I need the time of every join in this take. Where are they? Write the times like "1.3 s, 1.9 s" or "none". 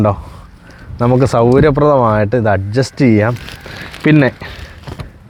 none